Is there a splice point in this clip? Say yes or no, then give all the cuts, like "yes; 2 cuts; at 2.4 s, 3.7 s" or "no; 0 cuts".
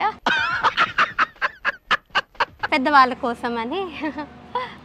yes; 1 cut; at 2.6 s